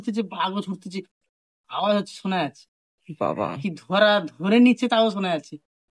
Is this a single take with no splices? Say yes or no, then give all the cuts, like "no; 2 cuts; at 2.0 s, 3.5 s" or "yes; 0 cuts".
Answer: yes; 0 cuts